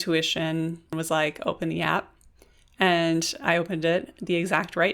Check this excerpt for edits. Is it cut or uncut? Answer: cut